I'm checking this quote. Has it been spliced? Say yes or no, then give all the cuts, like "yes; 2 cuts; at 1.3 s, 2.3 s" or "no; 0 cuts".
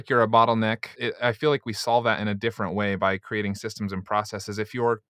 yes; 1 cut; at 1.0 s